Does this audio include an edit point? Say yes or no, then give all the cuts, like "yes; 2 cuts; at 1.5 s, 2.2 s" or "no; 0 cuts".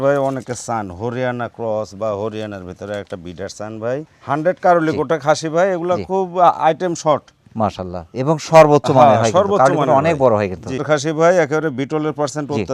yes; 2 cuts; at 4.1 s, 10.8 s